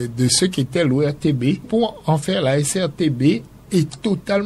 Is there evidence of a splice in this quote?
yes; 2 cuts; at 1.6 s, 3.5 s

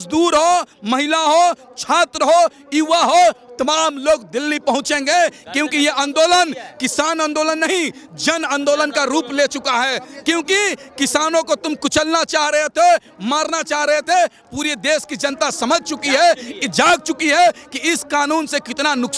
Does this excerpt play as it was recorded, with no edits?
yes; 0 cuts

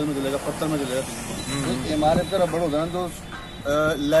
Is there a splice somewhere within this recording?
no; 0 cuts

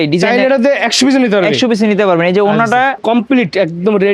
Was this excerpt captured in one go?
no; 1 cut; at 3.0 s

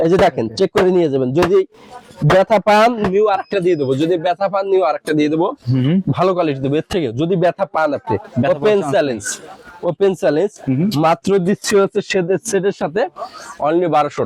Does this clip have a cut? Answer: no; 0 cuts

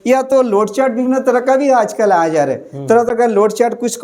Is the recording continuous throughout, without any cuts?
yes; 0 cuts

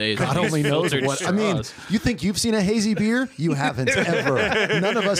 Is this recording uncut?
yes; 0 cuts

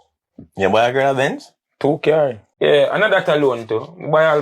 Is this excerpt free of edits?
no; 1 cut; at 2.4 s

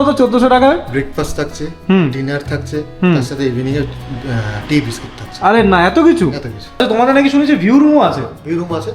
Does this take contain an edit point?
yes; 1 cut; at 6.8 s

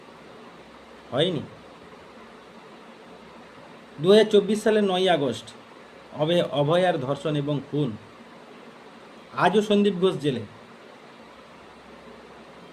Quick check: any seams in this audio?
no; 0 cuts

